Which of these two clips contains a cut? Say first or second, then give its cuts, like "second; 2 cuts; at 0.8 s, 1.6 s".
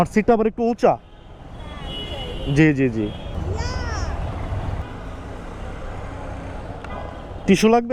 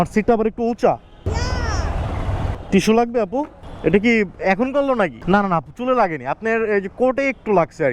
second; 3 cuts; at 1.3 s, 2.6 s, 5.2 s